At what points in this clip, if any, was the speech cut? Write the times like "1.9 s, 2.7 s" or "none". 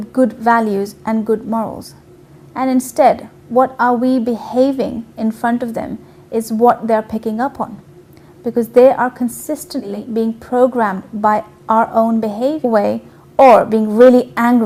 none